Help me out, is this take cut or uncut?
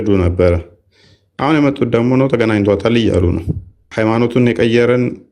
cut